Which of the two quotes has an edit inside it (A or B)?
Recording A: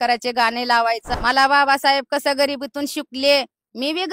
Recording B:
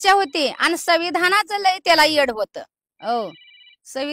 A